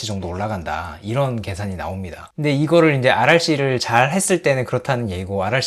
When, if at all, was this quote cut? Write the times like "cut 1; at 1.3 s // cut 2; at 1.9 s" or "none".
none